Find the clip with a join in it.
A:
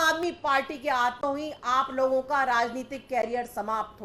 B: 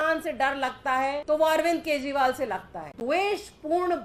B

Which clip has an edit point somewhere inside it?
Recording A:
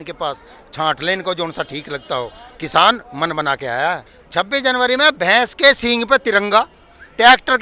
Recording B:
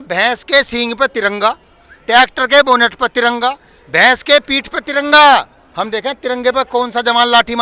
A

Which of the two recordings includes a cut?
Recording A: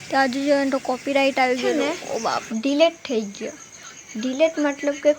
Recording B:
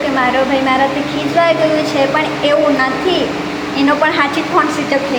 A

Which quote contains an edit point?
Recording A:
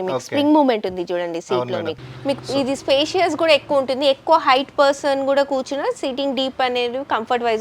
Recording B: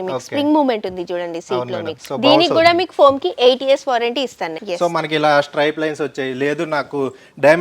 A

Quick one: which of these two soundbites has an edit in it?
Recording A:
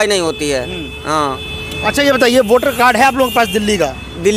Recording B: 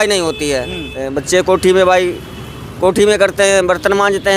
B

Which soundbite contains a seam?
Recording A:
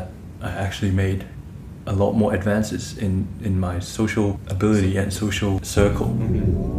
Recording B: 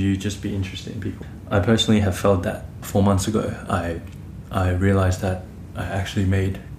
B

